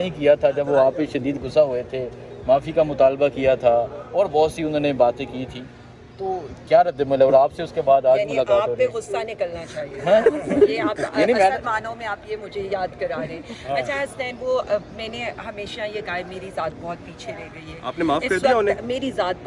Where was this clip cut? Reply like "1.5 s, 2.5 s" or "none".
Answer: none